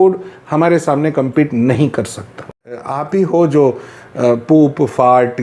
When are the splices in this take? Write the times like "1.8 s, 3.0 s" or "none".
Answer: 2.9 s

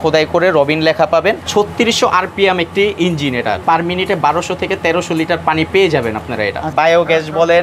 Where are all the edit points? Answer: 1.4 s, 6.7 s

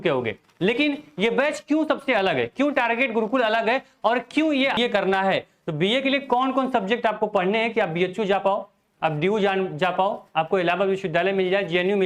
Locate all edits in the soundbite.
4.8 s

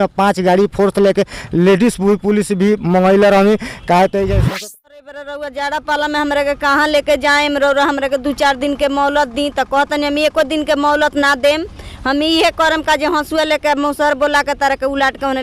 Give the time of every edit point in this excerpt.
4.5 s

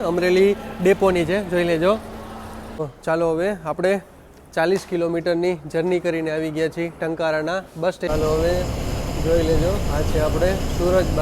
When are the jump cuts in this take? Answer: 2.7 s, 8.1 s

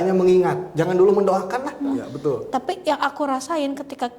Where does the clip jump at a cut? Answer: 2.1 s

